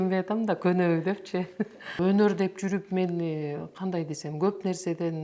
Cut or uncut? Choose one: cut